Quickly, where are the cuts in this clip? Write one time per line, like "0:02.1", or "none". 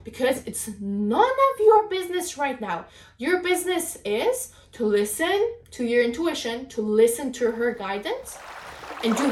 none